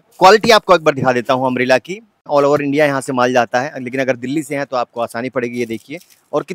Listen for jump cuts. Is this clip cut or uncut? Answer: cut